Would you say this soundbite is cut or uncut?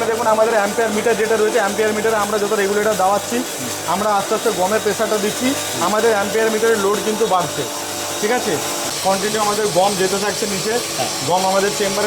uncut